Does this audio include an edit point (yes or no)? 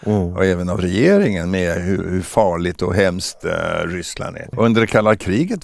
yes